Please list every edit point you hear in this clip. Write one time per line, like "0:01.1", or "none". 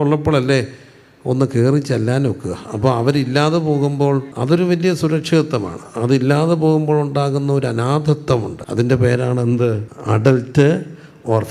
0:04.3
0:08.6
0:09.9